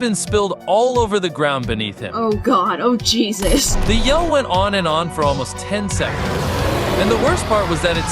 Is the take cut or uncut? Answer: cut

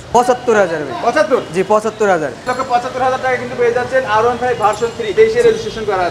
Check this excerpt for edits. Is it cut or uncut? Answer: cut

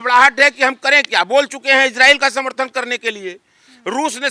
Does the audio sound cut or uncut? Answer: uncut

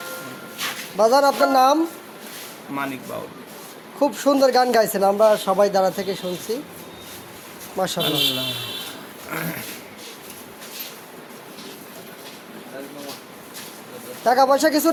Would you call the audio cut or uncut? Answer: uncut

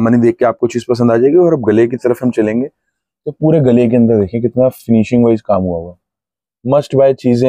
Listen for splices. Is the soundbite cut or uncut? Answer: uncut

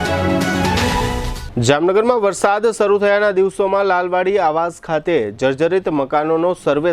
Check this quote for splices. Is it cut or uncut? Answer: uncut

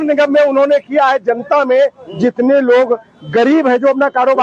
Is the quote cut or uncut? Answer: uncut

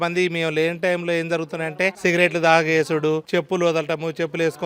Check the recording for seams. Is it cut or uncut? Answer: cut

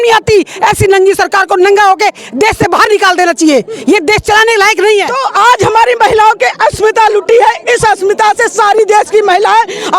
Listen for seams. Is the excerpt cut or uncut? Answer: cut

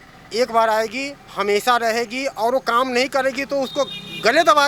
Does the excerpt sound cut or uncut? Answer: uncut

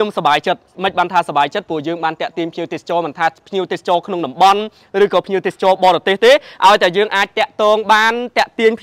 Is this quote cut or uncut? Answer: uncut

